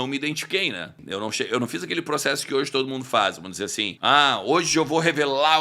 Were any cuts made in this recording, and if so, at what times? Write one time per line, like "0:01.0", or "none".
0:00.9
0:03.9